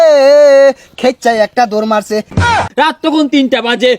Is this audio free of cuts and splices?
no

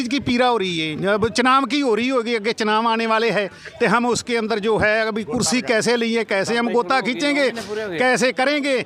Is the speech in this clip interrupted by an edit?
no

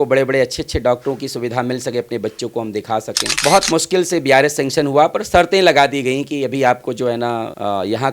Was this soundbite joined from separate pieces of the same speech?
yes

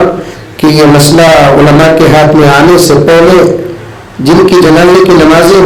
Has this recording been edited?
no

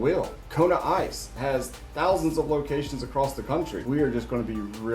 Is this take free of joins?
no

